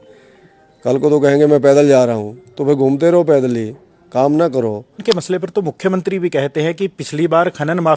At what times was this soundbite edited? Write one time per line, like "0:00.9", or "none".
0:05.0